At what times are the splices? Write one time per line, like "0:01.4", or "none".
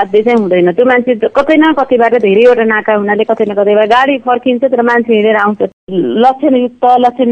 0:05.9